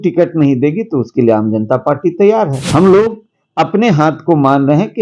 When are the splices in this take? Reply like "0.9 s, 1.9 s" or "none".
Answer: 2.6 s